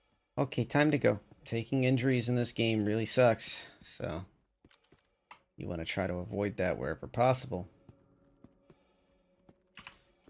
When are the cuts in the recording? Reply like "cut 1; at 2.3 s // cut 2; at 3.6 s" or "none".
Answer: cut 1; at 1.3 s